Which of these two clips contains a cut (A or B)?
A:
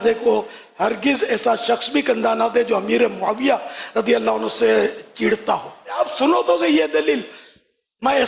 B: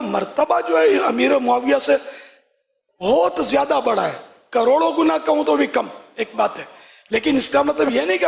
A